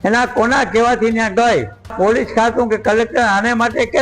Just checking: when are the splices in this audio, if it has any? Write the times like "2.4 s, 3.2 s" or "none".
1.9 s